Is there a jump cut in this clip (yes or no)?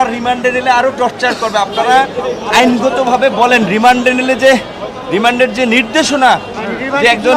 no